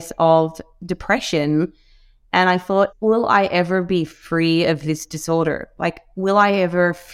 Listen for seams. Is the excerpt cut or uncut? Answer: cut